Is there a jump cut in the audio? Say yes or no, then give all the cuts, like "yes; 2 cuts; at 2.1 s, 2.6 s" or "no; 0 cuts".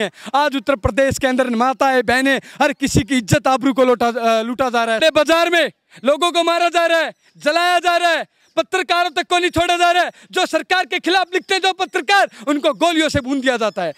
yes; 1 cut; at 5.0 s